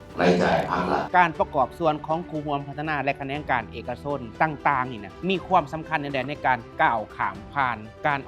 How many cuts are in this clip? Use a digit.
1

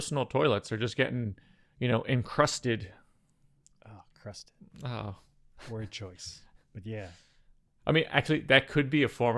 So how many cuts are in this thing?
0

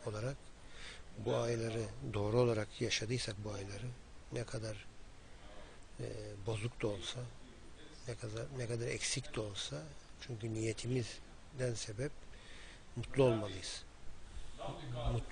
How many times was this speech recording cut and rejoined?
0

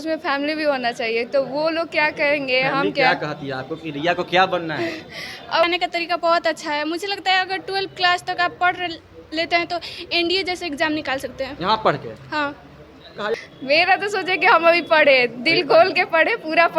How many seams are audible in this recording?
2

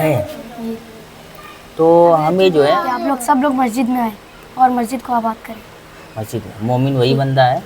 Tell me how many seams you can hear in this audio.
1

